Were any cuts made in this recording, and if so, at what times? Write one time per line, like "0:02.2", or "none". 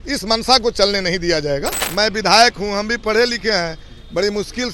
0:01.8